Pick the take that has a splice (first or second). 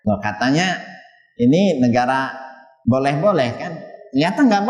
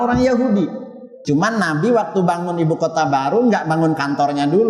second